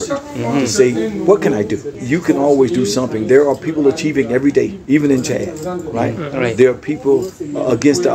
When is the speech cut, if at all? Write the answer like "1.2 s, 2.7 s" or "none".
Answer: 1.9 s, 4.8 s